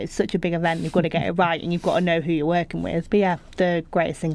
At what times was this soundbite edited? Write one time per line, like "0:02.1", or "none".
0:03.0